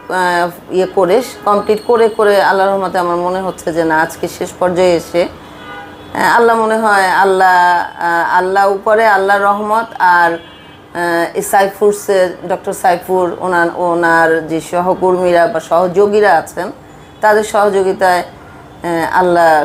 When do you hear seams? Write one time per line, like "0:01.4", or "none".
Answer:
none

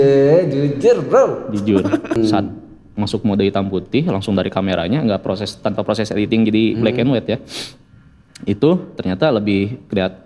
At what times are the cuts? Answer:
0:02.2

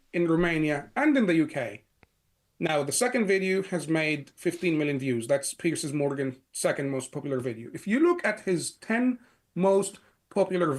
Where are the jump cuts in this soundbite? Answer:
none

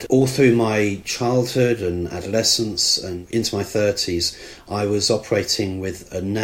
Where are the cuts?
0:03.2

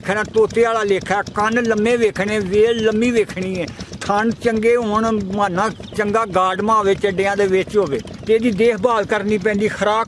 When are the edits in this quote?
0:08.1

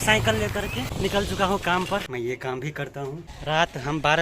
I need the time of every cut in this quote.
0:00.9
0:02.1
0:03.3

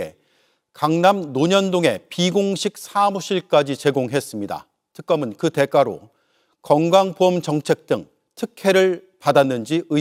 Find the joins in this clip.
none

